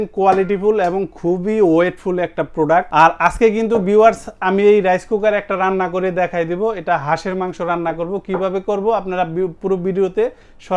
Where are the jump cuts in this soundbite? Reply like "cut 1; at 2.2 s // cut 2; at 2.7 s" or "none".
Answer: cut 1; at 2.9 s